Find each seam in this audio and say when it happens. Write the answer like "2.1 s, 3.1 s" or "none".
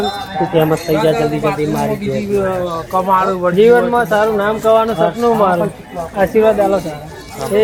none